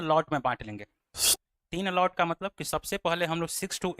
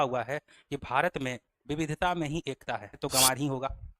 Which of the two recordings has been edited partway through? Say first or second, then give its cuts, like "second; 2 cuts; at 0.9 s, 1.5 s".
second; 1 cut; at 3.0 s